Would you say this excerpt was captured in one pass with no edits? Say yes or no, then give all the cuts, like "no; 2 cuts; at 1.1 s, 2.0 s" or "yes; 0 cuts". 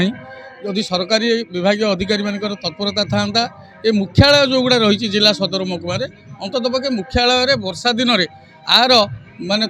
yes; 0 cuts